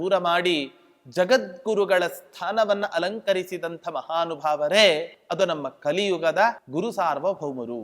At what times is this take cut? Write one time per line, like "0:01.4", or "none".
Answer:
0:05.2
0:06.6